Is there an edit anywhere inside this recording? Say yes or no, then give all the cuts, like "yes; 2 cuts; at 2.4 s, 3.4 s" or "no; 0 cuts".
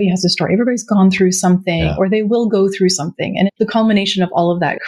yes; 1 cut; at 3.5 s